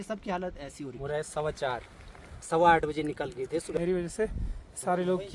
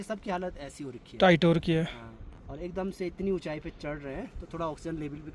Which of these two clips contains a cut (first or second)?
first